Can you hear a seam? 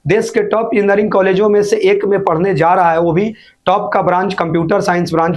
no; 0 cuts

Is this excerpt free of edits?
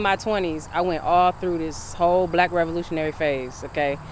yes; 0 cuts

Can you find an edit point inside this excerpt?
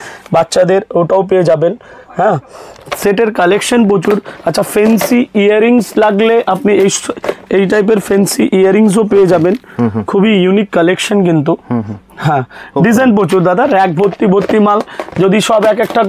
no; 0 cuts

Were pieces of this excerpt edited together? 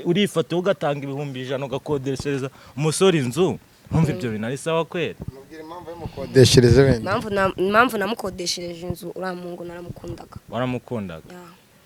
no; 0 cuts

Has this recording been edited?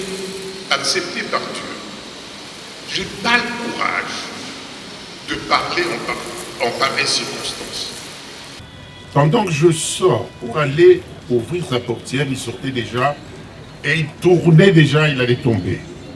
yes; 1 cut; at 8.6 s

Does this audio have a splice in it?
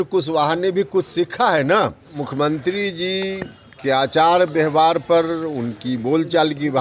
yes; 1 cut; at 2.2 s

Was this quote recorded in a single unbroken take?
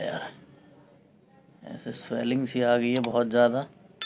yes; 0 cuts

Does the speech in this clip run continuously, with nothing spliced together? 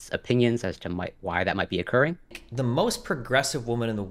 no; 1 cut; at 2.4 s

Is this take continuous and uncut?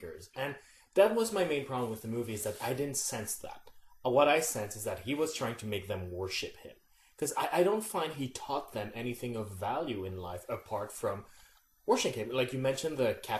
yes; 0 cuts

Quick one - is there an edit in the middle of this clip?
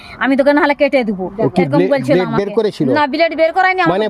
no; 0 cuts

